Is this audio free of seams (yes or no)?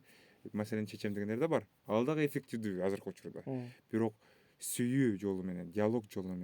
yes